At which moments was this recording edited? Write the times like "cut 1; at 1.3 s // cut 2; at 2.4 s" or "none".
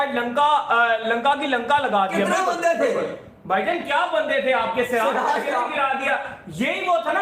none